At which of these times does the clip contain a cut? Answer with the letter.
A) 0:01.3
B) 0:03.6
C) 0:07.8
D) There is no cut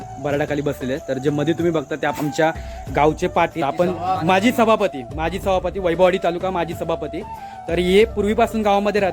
B